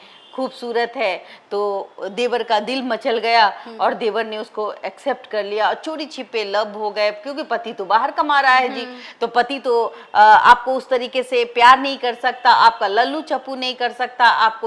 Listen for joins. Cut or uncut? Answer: uncut